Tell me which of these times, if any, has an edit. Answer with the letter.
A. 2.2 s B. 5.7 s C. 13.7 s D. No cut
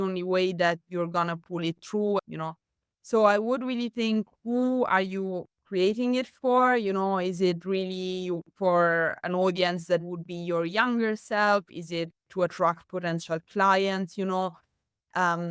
A